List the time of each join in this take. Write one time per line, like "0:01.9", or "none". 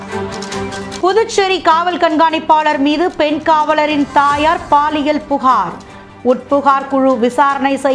none